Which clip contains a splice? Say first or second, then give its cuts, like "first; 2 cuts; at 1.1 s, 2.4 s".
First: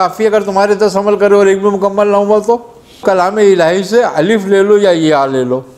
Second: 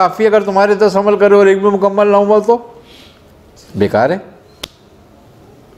first; 1 cut; at 3.0 s